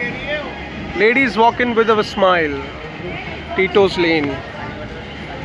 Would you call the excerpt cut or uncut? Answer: uncut